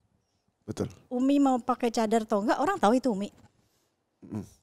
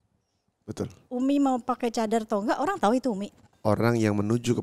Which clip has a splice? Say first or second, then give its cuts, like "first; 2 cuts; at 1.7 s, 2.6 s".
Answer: second; 1 cut; at 3.4 s